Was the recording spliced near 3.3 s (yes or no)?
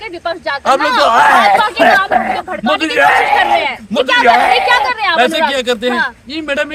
no